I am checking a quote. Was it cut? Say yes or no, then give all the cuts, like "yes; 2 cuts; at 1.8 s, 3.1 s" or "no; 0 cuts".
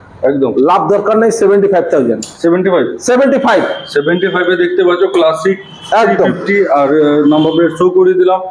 no; 0 cuts